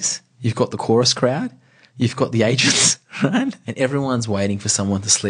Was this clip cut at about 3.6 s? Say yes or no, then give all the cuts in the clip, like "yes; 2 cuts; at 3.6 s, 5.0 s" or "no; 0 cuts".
yes; 1 cut; at 3.6 s